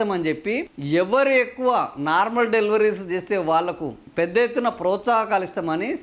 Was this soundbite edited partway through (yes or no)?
no